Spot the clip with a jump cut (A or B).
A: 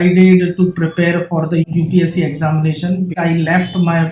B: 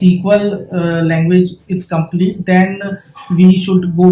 A